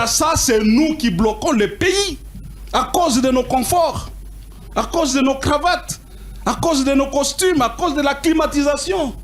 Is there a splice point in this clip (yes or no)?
no